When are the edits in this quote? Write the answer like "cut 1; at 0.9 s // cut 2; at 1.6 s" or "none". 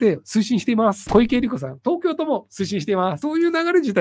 cut 1; at 1.1 s // cut 2; at 3.2 s